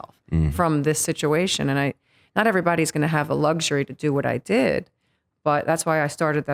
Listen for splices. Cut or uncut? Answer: uncut